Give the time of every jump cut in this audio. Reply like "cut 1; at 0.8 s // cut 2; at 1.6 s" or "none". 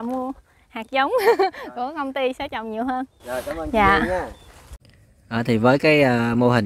none